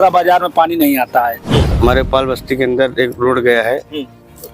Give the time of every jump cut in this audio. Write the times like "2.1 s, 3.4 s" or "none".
1.7 s